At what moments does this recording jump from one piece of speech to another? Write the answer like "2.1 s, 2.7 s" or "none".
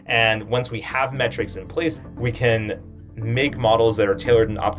1.9 s